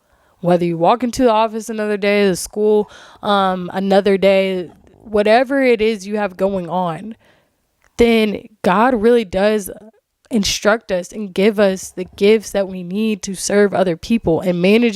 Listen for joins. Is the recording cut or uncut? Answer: uncut